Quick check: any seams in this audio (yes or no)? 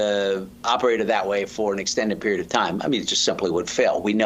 no